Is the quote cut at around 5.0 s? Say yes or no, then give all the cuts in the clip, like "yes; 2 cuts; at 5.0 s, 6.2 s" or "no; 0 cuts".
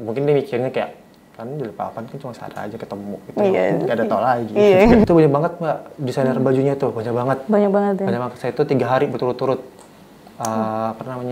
yes; 1 cut; at 5.0 s